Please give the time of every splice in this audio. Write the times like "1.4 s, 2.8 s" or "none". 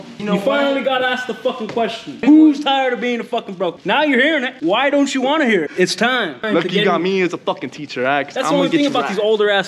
2.1 s, 3.8 s, 4.5 s, 6.4 s